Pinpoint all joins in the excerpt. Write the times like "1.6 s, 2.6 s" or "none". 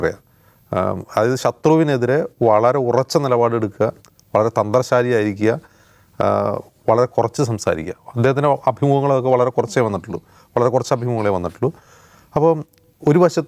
none